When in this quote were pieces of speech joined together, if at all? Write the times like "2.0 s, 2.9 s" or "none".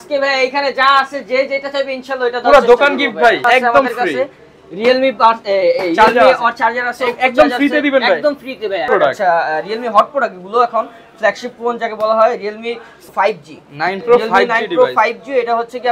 3.4 s, 8.9 s, 13.1 s